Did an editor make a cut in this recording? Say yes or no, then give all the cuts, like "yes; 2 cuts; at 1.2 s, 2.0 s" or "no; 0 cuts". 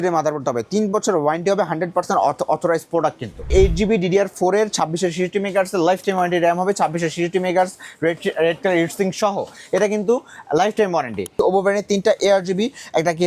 yes; 2 cuts; at 3.4 s, 11.3 s